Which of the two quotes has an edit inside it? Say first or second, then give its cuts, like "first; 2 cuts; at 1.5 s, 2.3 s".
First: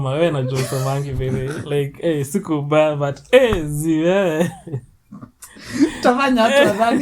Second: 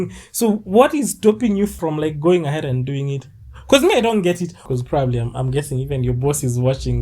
second; 2 cuts; at 1.8 s, 4.5 s